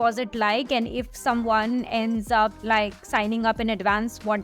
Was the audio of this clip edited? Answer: no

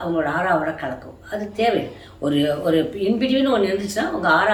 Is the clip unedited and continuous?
yes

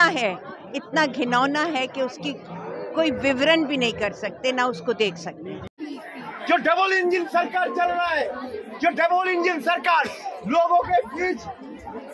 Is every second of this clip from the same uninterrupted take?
yes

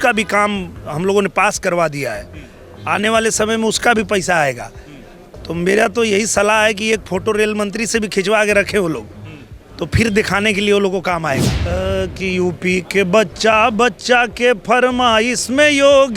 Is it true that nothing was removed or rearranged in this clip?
no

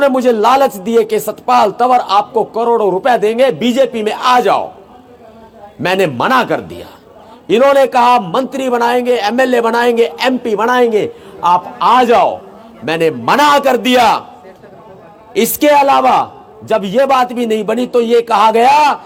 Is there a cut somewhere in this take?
no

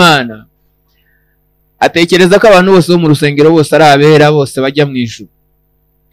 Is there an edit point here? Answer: no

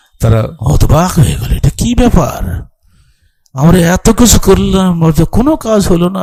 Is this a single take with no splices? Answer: yes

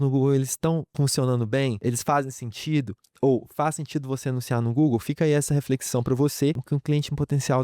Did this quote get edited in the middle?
yes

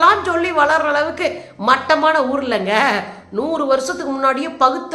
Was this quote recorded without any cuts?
yes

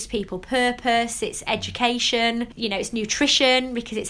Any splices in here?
yes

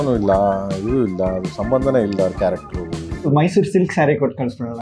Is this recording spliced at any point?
yes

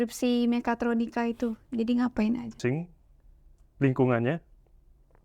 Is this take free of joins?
no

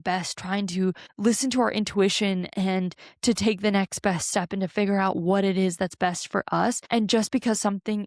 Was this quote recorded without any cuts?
no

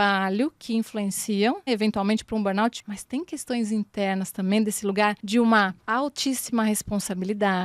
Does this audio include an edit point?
yes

